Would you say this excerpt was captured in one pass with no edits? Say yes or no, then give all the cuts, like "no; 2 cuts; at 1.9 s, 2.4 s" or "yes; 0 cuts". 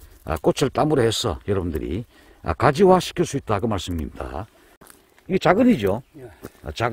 no; 1 cut; at 4.6 s